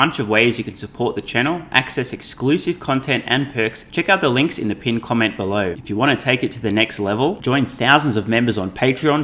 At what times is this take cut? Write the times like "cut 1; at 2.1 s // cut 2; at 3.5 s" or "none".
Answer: cut 1; at 3.8 s // cut 2; at 5.8 s